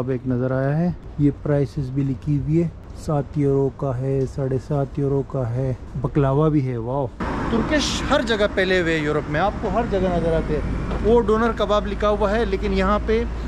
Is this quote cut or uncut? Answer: cut